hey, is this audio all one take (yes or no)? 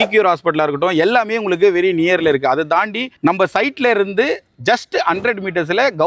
yes